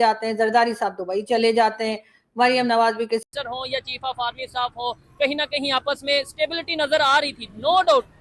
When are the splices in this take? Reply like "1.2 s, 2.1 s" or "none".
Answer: 3.2 s